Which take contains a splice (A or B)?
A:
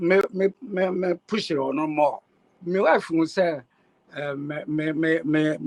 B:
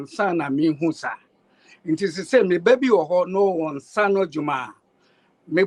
A